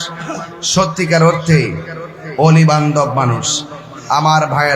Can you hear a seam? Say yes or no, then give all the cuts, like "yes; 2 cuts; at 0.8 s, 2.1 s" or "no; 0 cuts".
no; 0 cuts